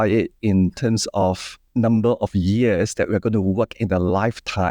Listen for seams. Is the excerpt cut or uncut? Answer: cut